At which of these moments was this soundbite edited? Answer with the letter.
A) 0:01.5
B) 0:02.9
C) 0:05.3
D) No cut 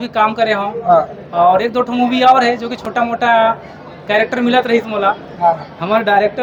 D